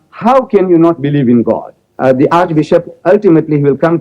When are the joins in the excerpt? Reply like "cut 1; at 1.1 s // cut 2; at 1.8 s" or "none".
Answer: cut 1; at 1.8 s